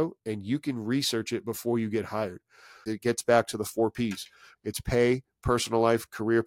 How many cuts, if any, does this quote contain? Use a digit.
2